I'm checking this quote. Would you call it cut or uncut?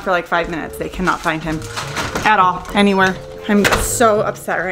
uncut